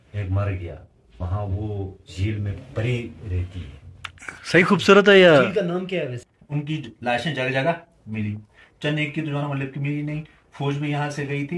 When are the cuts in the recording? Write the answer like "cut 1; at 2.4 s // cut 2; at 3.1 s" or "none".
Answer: cut 1; at 1.2 s // cut 2; at 6.3 s